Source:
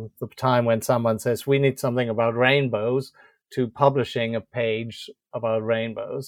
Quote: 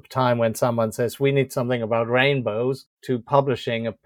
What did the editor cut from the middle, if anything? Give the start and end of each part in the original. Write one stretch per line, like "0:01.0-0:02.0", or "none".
0:03.2-0:03.4